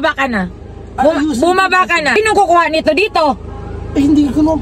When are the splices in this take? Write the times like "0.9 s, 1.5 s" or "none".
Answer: 2.2 s